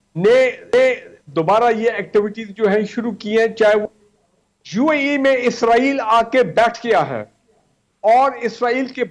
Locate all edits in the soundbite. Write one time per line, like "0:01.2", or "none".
0:03.8